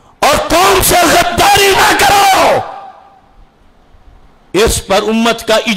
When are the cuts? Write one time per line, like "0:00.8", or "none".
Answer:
none